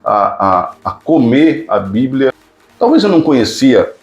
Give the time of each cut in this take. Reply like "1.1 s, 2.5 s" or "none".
2.4 s